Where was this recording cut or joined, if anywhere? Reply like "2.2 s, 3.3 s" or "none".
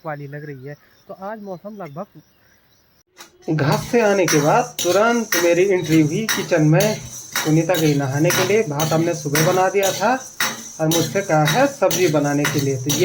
3.0 s